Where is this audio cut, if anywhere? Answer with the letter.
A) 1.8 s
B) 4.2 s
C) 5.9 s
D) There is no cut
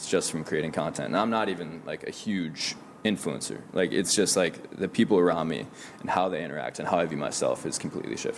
D